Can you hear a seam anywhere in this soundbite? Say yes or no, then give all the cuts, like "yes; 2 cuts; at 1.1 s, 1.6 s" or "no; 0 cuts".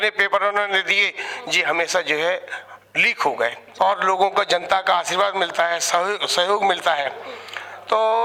yes; 1 cut; at 3.6 s